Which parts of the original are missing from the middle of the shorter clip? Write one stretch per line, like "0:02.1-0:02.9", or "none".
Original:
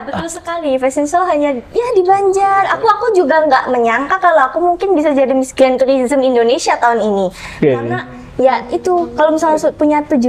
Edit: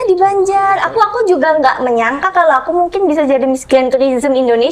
none